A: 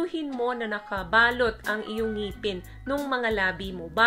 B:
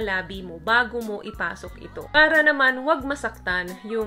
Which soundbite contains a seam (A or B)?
B